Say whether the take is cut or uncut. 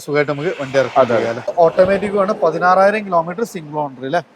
cut